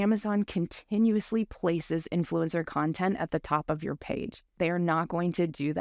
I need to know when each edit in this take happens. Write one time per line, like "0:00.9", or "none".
0:04.5